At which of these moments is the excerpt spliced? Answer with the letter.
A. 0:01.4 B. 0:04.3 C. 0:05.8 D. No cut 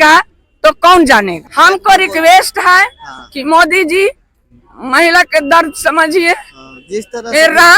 A